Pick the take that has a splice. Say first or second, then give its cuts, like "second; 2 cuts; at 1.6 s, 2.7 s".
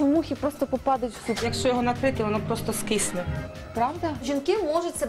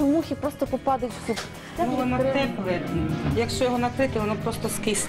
first; 2 cuts; at 1.5 s, 4.2 s